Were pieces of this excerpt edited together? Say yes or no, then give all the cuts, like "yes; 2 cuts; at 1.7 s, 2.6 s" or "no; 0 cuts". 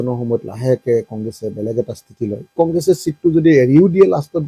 yes; 1 cut; at 2.5 s